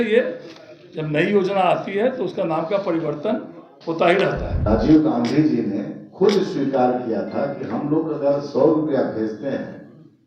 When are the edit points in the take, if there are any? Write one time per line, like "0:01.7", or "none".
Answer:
0:04.6